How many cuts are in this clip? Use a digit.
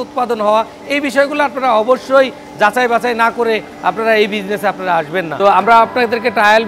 1